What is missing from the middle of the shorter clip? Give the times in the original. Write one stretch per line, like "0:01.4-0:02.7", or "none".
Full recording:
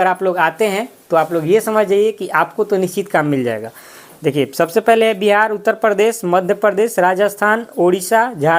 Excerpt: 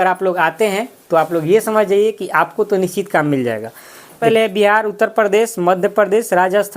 0:04.2-0:04.9